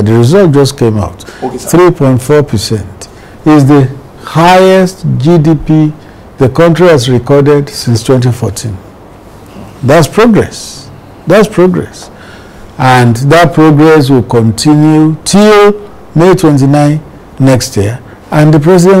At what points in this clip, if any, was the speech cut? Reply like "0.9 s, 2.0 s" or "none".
none